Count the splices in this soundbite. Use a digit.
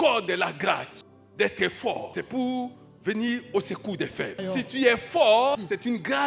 4